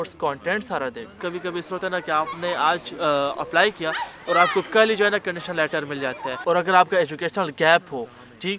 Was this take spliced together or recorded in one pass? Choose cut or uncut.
cut